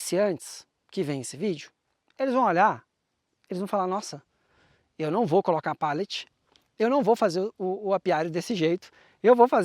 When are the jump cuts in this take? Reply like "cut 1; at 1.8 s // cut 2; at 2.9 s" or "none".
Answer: none